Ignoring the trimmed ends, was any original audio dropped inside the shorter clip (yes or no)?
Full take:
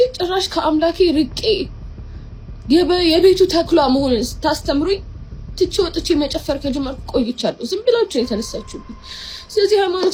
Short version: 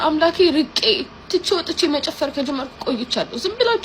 yes